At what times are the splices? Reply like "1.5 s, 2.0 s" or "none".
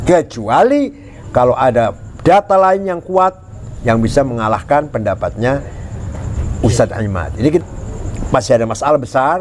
7.6 s